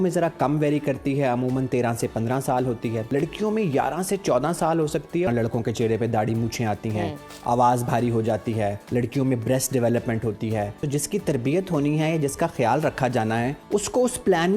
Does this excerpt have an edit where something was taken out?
yes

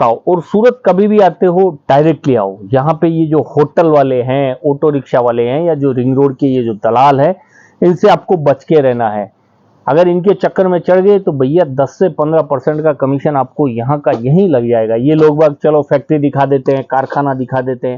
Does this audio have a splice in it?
no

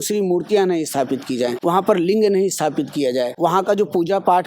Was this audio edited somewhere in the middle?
yes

